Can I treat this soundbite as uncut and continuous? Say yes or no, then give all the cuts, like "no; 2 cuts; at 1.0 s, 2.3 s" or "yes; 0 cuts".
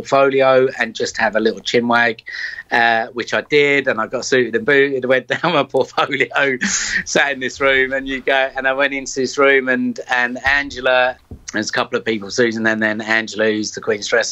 yes; 0 cuts